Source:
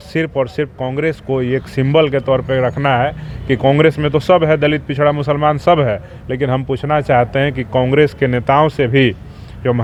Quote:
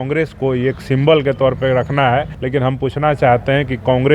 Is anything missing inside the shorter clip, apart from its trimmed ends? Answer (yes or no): yes